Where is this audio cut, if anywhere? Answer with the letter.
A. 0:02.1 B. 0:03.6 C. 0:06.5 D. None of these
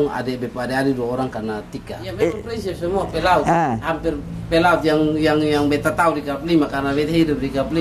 A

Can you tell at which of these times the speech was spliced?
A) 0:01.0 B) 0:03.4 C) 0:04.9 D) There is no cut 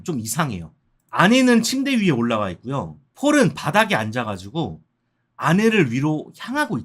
A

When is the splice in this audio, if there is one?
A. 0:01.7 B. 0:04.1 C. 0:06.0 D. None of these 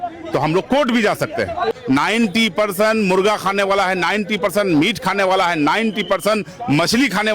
A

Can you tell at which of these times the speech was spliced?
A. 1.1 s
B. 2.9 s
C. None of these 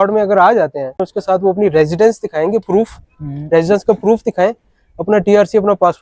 A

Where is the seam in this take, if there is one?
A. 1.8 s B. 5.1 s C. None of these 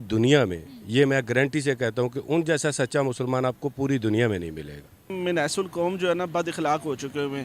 B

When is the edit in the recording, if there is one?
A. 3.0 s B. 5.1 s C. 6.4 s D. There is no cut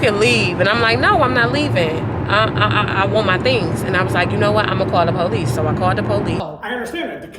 C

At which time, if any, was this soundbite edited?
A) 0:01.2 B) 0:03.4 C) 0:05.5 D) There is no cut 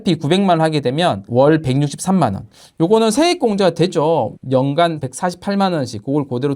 A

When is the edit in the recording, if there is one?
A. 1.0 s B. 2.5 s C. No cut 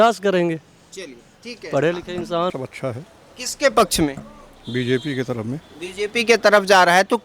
B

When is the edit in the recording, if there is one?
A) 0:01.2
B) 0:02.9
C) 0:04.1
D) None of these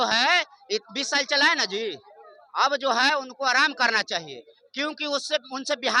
D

